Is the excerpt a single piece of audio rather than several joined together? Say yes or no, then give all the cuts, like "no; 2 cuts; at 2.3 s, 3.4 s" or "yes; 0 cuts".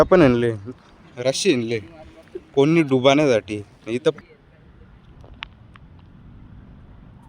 no; 1 cut; at 4.2 s